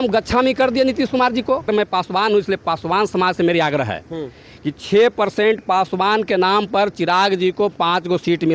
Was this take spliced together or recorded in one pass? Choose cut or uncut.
cut